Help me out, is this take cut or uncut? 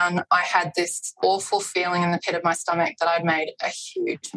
cut